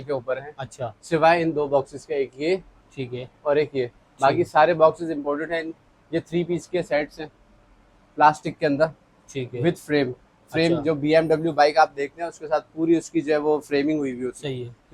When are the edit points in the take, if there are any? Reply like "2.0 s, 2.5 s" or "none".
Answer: none